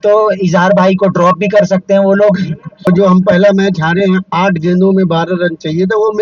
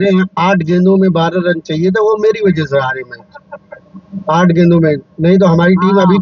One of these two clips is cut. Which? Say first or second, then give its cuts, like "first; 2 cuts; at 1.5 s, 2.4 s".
first; 1 cut; at 2.9 s